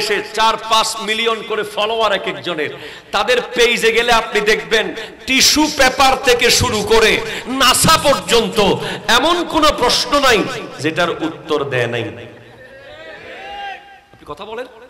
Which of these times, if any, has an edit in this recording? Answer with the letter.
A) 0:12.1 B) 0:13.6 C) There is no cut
C